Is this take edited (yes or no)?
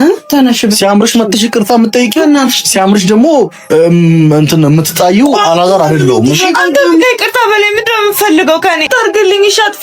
yes